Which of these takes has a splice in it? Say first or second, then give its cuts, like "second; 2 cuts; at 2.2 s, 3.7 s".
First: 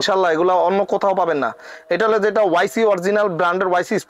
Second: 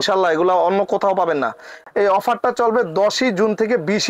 second; 1 cut; at 1.8 s